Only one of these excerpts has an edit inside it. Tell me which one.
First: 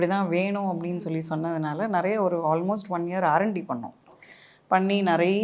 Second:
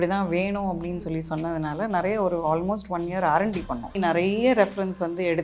second; 1 cut; at 4.0 s

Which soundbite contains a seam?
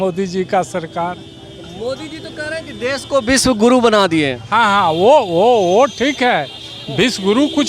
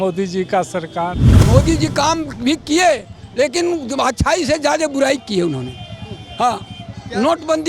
second; 1 cut; at 1.3 s

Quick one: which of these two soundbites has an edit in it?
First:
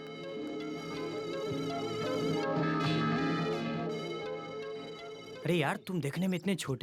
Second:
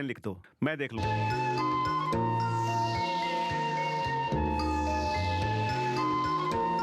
second; 1 cut; at 1.0 s

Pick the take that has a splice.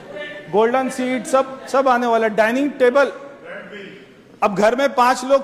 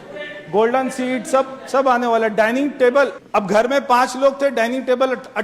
second; 1 cut; at 3.2 s

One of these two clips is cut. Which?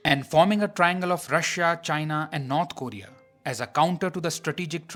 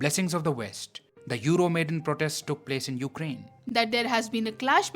second; 1 cut; at 3.6 s

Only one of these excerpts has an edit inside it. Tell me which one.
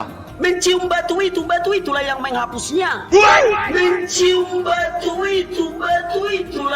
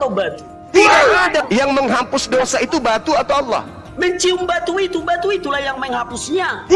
second; 1 cut; at 1.4 s

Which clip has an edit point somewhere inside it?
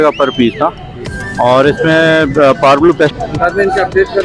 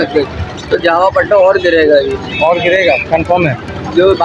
first; 1 cut; at 3.1 s

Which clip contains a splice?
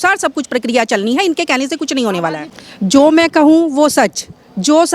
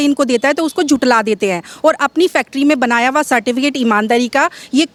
first; 1 cut; at 2.5 s

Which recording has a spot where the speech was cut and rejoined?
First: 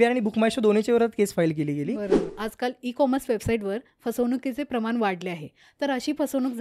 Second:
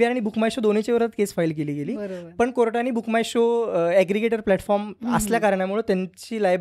first; 1 cut; at 2.2 s

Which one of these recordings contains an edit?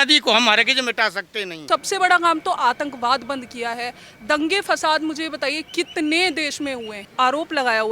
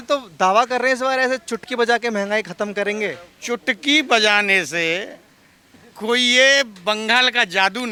first; 2 cuts; at 1.6 s, 7.0 s

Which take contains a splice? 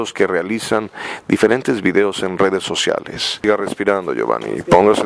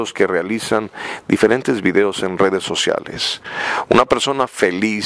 first; 1 cut; at 3.4 s

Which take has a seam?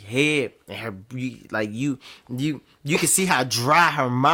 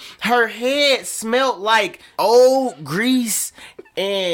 second; 1 cut; at 2.0 s

